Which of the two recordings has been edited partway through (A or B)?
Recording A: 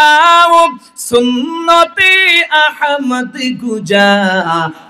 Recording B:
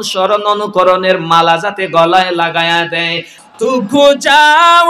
B